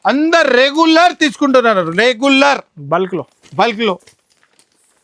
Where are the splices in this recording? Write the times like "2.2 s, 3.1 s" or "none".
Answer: none